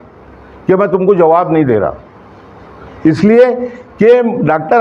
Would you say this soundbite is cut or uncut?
uncut